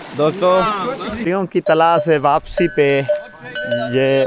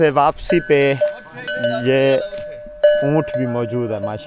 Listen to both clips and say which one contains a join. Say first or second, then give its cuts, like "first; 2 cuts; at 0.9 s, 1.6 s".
first; 1 cut; at 1.2 s